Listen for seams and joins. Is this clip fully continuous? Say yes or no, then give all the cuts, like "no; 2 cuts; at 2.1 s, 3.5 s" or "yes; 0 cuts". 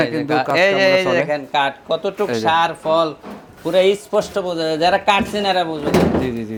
yes; 0 cuts